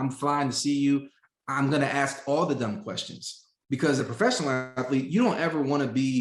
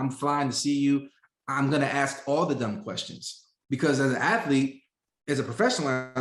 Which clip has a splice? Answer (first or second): first